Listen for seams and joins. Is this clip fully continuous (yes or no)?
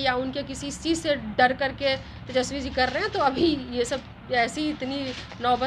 yes